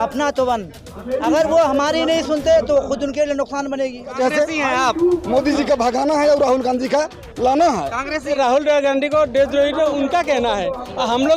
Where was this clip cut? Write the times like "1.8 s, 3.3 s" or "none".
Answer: 4.1 s, 8.3 s